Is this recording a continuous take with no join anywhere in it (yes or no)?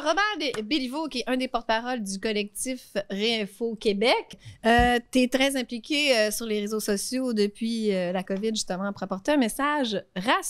no